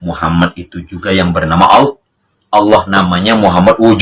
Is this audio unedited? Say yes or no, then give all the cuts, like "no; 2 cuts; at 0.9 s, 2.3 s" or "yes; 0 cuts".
yes; 0 cuts